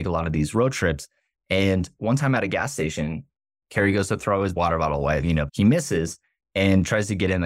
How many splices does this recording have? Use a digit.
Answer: 1